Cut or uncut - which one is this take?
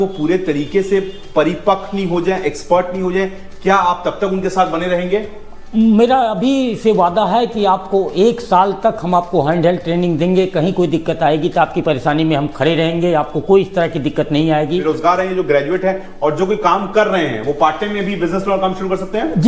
cut